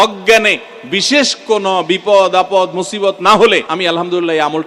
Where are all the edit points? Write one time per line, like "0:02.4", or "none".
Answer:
0:03.7